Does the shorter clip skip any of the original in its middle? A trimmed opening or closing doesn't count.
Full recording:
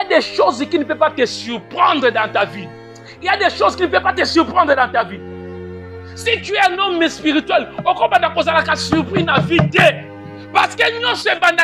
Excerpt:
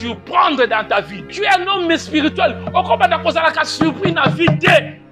yes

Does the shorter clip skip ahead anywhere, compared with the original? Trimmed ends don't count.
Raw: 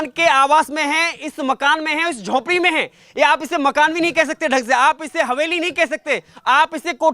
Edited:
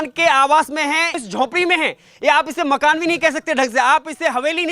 yes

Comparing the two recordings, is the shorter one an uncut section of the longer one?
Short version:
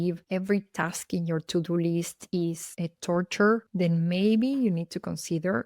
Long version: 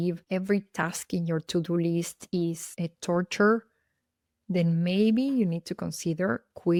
no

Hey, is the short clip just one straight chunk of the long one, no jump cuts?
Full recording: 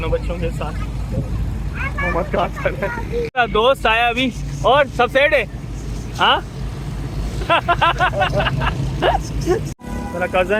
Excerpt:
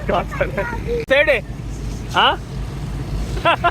no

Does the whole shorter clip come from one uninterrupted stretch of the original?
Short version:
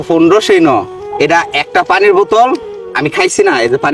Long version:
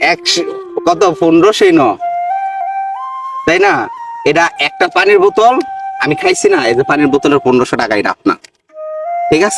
no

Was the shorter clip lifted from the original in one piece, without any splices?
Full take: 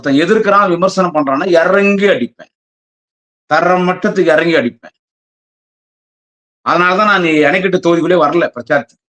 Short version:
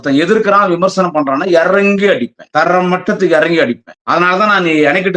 no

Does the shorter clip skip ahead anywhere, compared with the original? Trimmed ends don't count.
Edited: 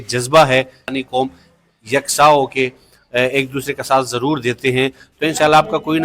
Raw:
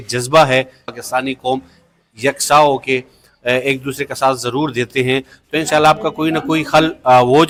yes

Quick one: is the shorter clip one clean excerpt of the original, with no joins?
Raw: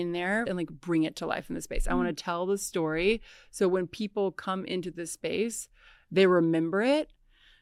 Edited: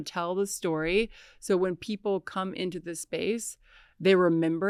yes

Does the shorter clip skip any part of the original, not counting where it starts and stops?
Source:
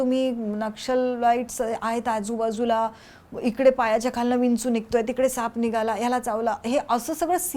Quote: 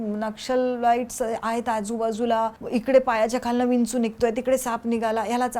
yes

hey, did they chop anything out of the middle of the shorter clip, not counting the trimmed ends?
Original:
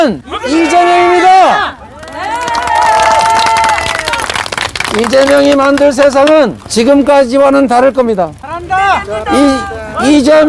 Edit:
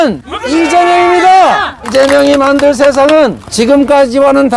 yes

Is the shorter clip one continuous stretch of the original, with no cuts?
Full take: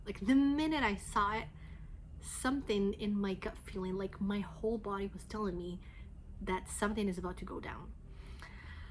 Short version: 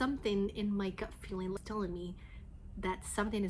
no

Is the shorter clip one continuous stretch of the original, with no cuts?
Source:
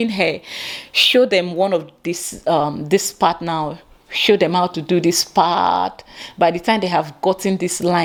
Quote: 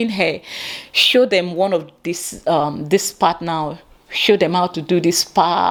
yes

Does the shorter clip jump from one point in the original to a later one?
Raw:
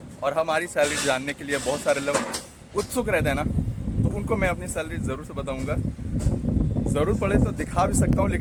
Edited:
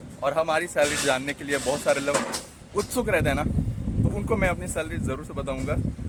no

